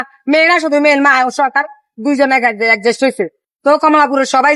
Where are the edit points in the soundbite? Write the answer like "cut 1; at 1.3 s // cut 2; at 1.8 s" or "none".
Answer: none